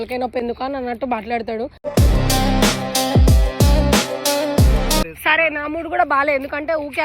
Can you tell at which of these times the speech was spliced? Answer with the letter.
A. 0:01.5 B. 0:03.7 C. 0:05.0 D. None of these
C